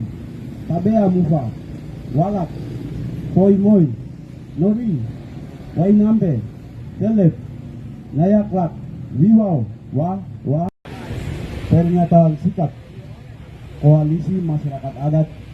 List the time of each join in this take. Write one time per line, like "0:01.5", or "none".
0:10.7